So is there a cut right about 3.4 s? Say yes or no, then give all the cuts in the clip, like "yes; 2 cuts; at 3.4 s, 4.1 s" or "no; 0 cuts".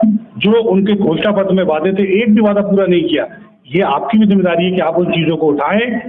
no; 0 cuts